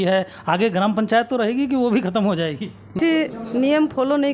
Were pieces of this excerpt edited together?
yes; 1 cut; at 2.9 s

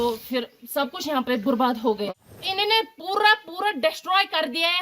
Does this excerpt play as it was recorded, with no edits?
no; 1 cut; at 2.1 s

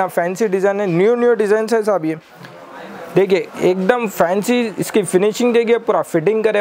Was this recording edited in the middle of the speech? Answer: no; 0 cuts

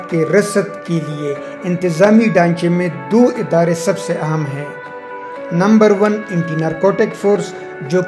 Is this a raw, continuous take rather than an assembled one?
yes; 0 cuts

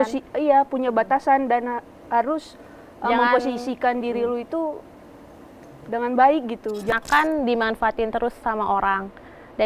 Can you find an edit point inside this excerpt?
yes; 1 cut; at 6.9 s

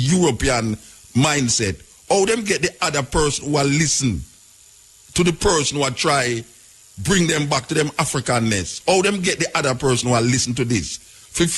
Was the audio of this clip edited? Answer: no; 0 cuts

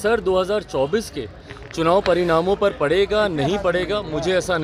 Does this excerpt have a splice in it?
no; 0 cuts

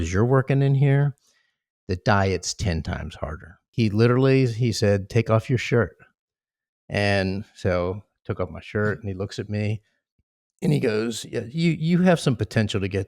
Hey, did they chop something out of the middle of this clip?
yes; 1 cut; at 3.7 s

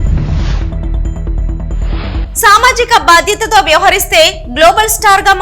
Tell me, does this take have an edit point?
no; 0 cuts

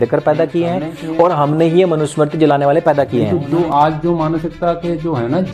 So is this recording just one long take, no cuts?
no; 1 cut; at 3.4 s

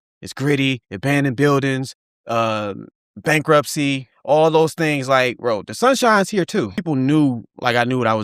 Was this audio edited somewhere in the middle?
yes; 1 cut; at 6.8 s

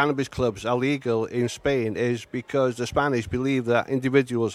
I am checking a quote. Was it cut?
no; 0 cuts

